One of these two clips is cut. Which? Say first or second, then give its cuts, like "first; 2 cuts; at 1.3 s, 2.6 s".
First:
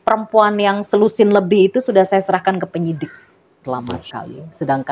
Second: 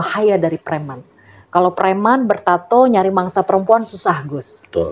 first; 1 cut; at 3.6 s